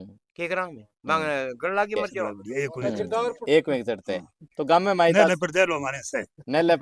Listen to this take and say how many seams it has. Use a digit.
1